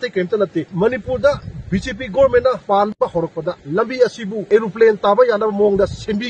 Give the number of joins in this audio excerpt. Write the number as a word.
zero